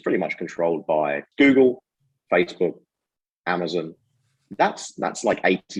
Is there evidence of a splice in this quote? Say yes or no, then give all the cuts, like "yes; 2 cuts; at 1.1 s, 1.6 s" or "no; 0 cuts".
yes; 1 cut; at 1.3 s